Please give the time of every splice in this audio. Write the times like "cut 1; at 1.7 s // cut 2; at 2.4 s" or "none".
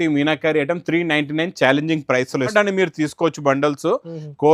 cut 1; at 2.5 s